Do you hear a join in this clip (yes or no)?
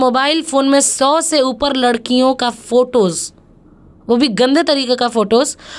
no